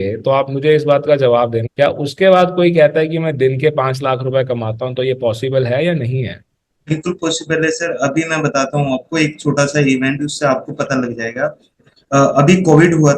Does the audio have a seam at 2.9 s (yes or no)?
no